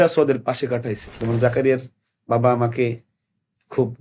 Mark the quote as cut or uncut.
cut